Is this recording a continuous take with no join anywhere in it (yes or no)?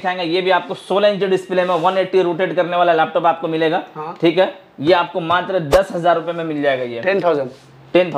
yes